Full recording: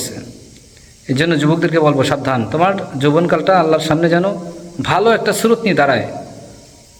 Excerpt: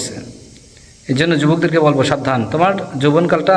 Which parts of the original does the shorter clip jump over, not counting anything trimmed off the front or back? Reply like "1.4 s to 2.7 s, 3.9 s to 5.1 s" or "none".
none